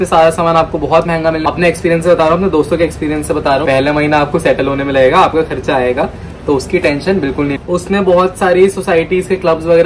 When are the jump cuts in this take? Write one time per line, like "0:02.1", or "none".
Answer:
0:01.4
0:03.6
0:07.5